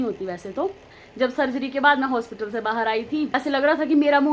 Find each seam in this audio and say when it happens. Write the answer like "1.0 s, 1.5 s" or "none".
1.0 s, 3.3 s